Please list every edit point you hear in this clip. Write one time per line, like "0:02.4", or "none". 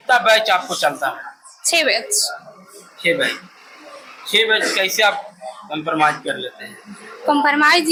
none